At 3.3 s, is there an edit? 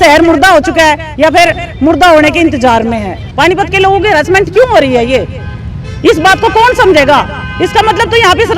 yes; 1 cut; at 3.3 s

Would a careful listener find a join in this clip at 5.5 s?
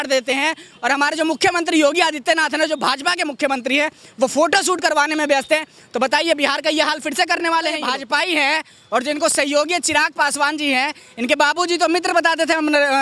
no; 1 cut; at 7.8 s

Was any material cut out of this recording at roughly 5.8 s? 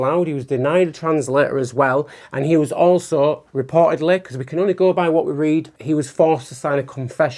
yes; 1 cut; at 5.8 s

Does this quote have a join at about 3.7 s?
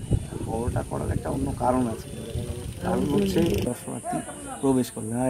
yes; 1 cut; at 3.7 s

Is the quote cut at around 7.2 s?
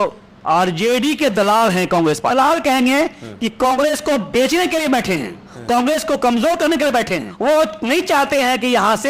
yes; 2 cuts; at 2.3 s, 7.2 s

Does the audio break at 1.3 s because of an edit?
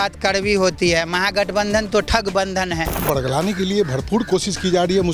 no; 1 cut; at 3.0 s

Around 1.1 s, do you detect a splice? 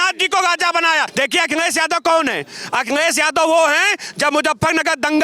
yes; 1 cut; at 1.1 s

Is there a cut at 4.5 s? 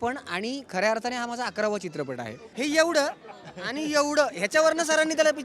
no; 1 cut; at 2.4 s

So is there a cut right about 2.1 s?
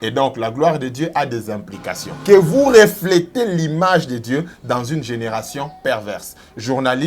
yes; 1 cut; at 2.1 s

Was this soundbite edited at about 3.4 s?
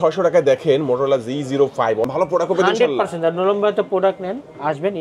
no; 1 cut; at 2.1 s

